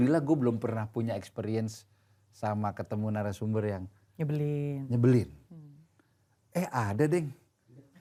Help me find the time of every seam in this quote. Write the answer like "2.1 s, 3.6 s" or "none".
none